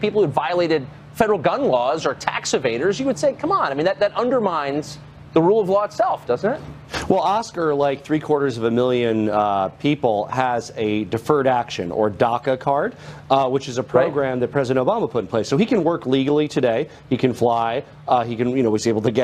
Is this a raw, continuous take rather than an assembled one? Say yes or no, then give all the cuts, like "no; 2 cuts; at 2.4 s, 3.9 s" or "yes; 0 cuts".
no; 1 cut; at 13.0 s